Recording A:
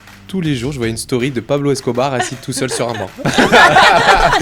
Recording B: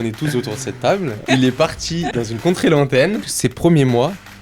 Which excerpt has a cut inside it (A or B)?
B